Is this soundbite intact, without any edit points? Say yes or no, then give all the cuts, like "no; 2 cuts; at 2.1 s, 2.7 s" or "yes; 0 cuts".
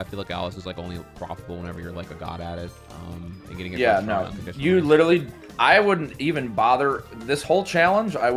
yes; 0 cuts